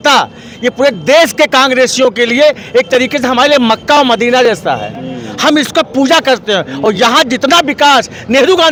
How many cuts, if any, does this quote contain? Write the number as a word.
zero